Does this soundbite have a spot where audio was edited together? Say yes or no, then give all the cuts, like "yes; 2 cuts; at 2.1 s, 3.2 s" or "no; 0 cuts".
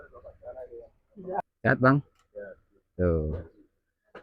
yes; 1 cut; at 1.5 s